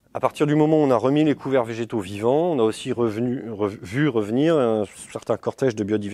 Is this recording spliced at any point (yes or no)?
no